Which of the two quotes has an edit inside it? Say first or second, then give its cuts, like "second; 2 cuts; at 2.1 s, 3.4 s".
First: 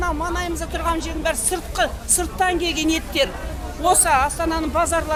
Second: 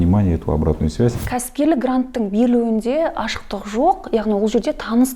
second; 1 cut; at 1.2 s